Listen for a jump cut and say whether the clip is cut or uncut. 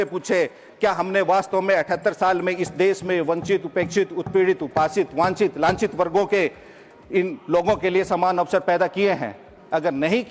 uncut